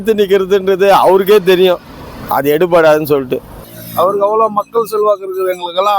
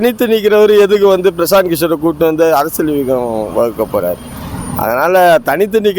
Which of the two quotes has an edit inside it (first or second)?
first